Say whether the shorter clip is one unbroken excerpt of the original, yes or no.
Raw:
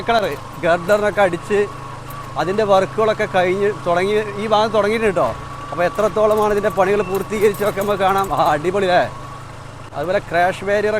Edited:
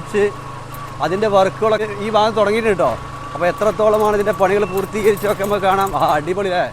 no